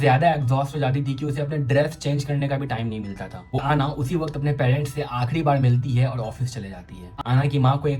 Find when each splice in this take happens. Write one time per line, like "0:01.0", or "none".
0:03.6
0:07.1